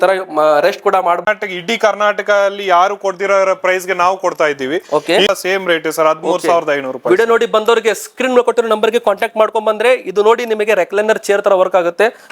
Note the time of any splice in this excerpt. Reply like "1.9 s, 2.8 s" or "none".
1.2 s, 5.3 s